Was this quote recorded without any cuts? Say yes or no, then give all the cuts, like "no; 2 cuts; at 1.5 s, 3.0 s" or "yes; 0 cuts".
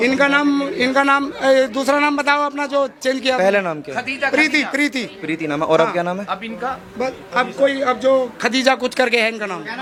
yes; 0 cuts